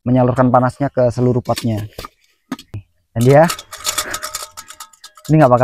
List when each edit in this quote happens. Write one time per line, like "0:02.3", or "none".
0:02.9

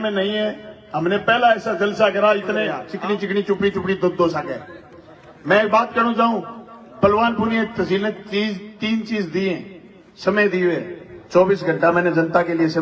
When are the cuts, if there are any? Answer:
0:02.9

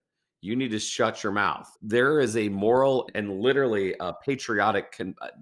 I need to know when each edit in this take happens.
0:01.7

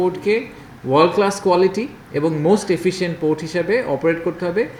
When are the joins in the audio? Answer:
none

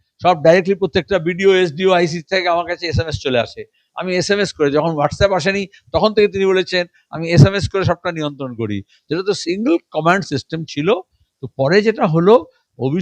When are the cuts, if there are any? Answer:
none

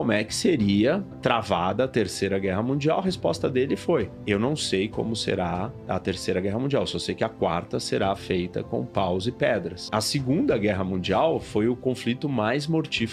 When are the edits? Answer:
none

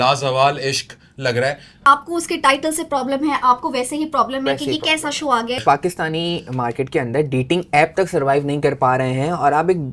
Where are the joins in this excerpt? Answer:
0:01.8
0:05.6

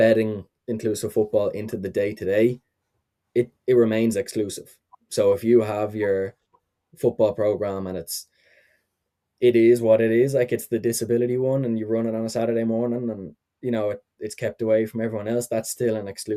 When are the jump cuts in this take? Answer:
none

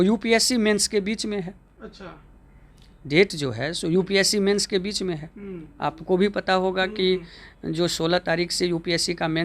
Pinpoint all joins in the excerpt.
none

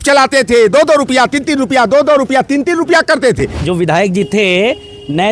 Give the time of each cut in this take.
0:03.6

